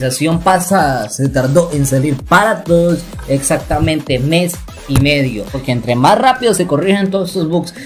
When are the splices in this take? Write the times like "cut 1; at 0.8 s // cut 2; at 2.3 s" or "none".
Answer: cut 1; at 5.6 s